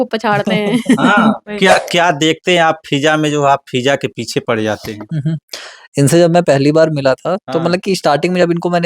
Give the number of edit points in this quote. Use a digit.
1